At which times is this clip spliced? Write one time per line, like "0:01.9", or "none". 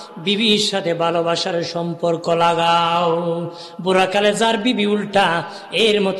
none